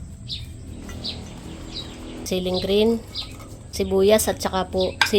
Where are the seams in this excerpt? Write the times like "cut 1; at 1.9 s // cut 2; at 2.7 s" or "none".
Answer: cut 1; at 2.3 s // cut 2; at 3.7 s